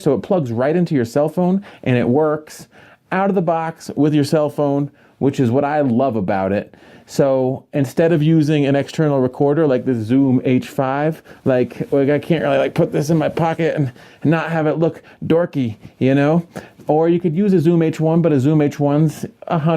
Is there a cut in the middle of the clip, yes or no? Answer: yes